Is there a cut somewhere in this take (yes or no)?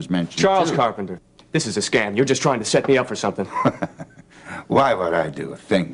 yes